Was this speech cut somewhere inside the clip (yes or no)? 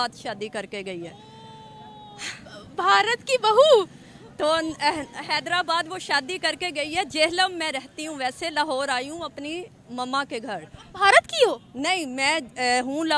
no